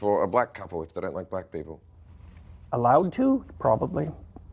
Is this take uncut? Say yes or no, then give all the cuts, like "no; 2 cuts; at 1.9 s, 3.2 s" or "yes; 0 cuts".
yes; 0 cuts